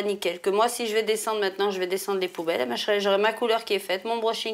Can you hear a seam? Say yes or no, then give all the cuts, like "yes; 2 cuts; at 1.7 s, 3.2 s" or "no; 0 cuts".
no; 0 cuts